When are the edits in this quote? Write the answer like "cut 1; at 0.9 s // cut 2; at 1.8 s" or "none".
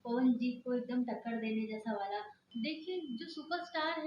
cut 1; at 2.4 s